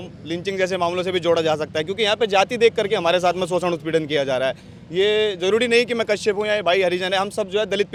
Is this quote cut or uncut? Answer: uncut